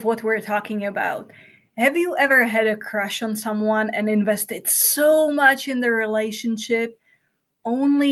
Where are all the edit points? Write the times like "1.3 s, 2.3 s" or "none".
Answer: none